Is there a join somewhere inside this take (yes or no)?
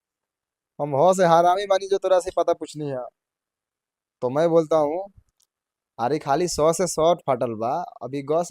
no